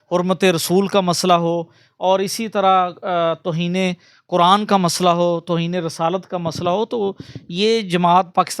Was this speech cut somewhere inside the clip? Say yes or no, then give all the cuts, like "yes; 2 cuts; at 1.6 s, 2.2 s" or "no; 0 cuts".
no; 0 cuts